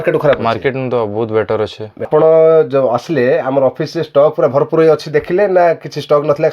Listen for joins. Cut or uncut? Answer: cut